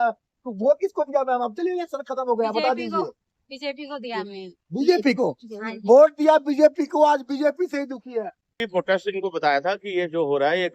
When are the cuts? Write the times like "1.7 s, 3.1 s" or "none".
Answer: 8.6 s